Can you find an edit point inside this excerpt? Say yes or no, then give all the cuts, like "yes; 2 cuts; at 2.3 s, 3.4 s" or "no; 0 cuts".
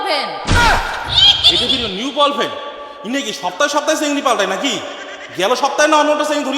no; 0 cuts